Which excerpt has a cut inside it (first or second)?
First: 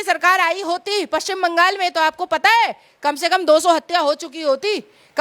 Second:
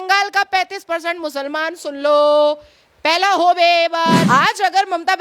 second